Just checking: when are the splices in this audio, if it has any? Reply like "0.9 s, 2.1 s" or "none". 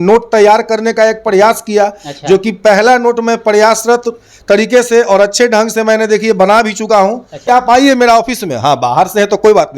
7.4 s